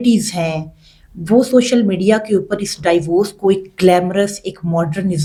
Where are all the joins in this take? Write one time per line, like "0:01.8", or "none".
none